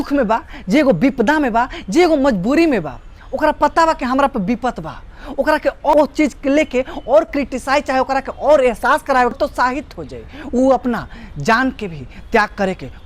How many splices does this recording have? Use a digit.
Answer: 2